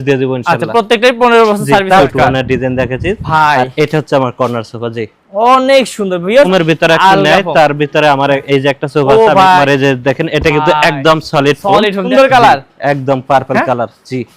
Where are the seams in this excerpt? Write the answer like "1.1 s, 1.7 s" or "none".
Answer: 2.0 s, 6.5 s, 9.6 s, 12.0 s